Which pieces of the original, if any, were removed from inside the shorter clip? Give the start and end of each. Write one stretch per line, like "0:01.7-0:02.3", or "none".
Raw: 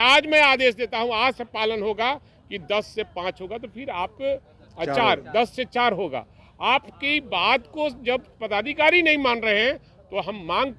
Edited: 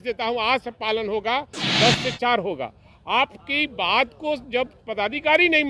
0:02.4-0:05.2